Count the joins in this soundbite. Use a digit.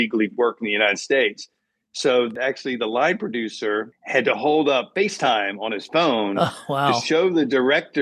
1